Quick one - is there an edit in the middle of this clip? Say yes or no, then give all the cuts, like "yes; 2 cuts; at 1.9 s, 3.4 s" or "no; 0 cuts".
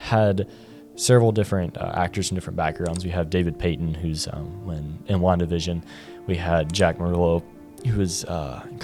no; 0 cuts